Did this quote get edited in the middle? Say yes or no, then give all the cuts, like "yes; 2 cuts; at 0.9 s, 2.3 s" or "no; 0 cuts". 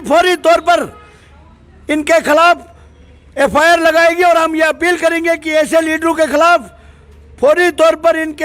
no; 0 cuts